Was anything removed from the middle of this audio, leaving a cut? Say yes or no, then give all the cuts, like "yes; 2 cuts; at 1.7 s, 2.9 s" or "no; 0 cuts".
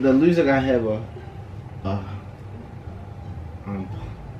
no; 0 cuts